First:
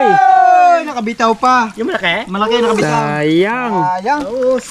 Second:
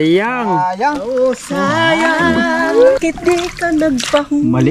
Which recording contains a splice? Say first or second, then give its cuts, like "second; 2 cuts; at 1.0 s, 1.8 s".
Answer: second; 1 cut; at 3.0 s